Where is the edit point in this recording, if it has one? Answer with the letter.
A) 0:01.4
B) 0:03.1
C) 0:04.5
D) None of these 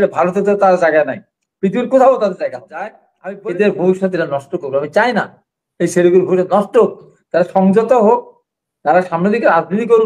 B